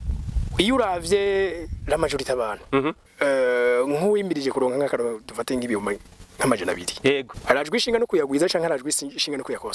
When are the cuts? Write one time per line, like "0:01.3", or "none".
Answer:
0:03.1
0:07.3